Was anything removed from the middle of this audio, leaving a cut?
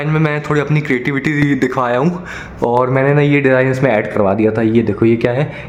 no; 0 cuts

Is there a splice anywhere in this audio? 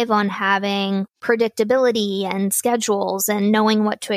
yes; 1 cut; at 1.1 s

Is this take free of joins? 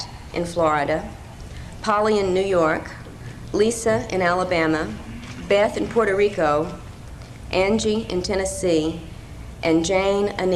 no; 1 cut; at 8.9 s

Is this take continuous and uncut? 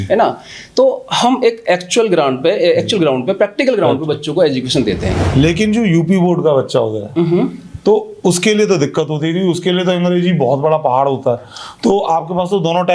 no; 1 cut; at 5.2 s

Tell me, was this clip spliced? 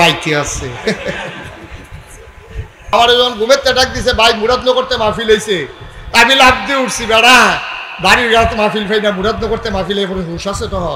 yes; 1 cut; at 2.9 s

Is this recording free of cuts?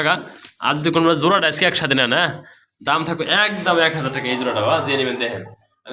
yes; 0 cuts

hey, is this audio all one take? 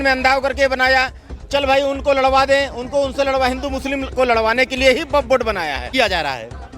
no; 1 cut; at 5.9 s

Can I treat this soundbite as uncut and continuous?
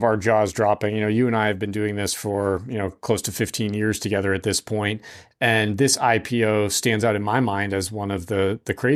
yes; 0 cuts

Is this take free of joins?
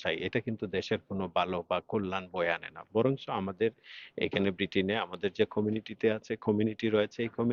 yes; 0 cuts

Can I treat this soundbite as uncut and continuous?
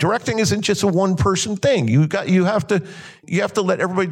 no; 1 cut; at 3.2 s

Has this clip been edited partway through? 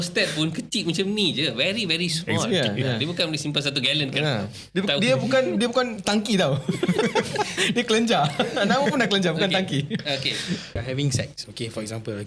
yes; 1 cut; at 10.8 s

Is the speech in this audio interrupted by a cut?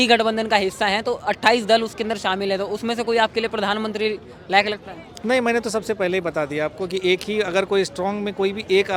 no; 0 cuts

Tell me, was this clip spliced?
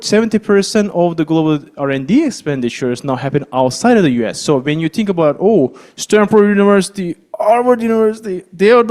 no; 0 cuts

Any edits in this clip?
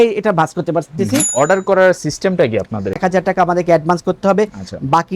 yes; 2 cuts; at 1.2 s, 3.0 s

